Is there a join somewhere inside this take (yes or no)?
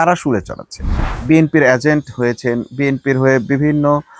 yes